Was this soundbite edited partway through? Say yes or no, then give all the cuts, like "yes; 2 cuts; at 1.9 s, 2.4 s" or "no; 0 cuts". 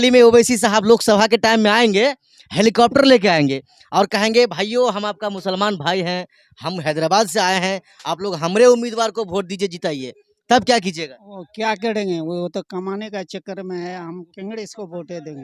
no; 0 cuts